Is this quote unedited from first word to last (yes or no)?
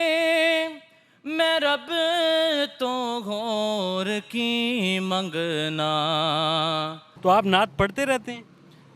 no